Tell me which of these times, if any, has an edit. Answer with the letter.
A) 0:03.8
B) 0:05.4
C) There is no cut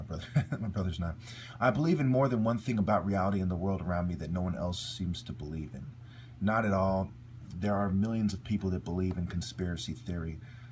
A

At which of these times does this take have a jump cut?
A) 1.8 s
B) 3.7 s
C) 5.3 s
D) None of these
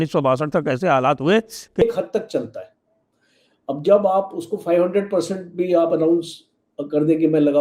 A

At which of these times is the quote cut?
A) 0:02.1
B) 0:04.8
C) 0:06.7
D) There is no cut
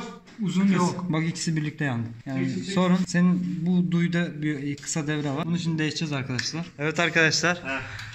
C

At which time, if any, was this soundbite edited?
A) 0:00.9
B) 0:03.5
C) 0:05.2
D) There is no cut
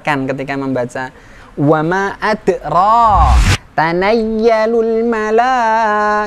B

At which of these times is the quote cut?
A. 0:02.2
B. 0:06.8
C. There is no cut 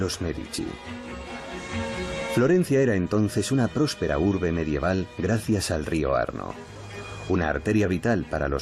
A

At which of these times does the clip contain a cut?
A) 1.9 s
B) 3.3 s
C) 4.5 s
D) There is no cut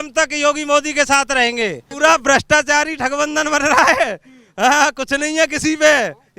A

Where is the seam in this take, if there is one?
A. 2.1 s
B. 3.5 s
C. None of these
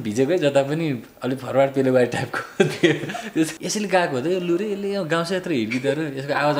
B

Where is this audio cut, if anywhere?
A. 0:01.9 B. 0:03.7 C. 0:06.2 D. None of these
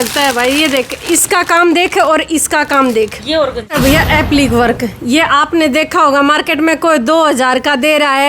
B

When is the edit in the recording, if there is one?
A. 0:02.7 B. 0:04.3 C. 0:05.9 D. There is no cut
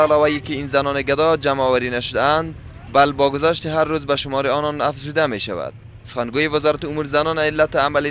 A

